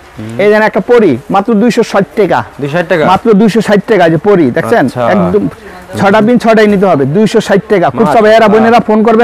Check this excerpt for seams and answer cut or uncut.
uncut